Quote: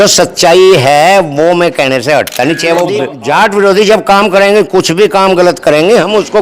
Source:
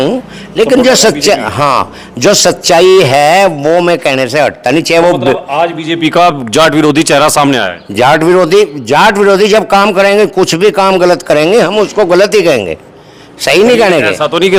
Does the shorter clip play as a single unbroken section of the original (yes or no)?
no